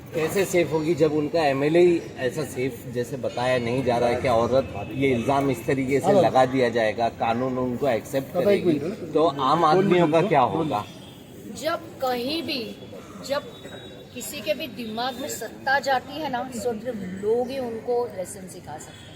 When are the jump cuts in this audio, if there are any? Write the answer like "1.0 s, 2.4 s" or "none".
none

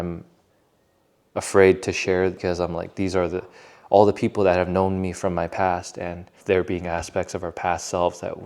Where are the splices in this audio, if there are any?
2.4 s, 6.3 s

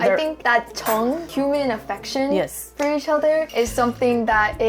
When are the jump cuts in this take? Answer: none

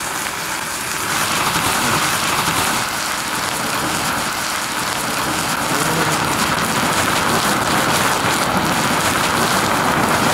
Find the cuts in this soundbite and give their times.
1.1 s

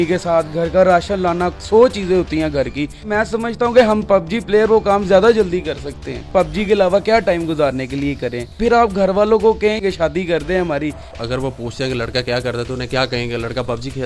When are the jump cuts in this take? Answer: 3.1 s, 6.2 s, 8.5 s, 9.8 s, 11.1 s

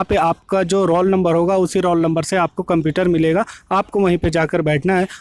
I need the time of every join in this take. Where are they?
none

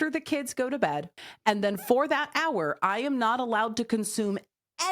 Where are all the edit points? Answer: 1.1 s

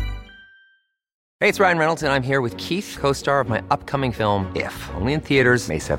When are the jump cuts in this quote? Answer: 1.2 s

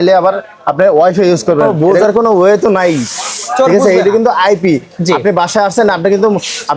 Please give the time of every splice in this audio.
1.7 s

